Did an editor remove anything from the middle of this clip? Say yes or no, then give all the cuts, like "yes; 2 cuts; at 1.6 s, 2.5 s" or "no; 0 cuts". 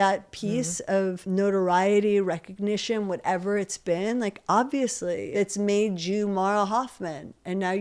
yes; 2 cuts; at 1.2 s, 5.3 s